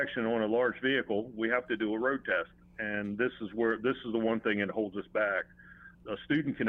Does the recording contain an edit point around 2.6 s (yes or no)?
no